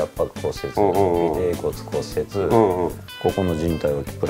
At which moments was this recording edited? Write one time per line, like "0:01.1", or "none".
0:03.1